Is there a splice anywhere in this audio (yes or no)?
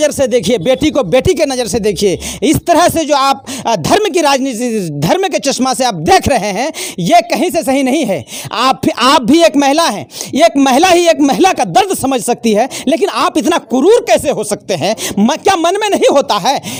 no